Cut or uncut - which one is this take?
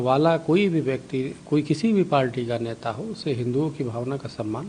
uncut